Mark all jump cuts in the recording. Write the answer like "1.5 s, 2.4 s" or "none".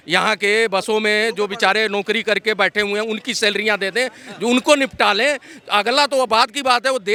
none